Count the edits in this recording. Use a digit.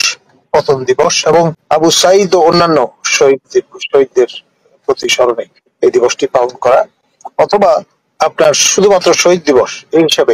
1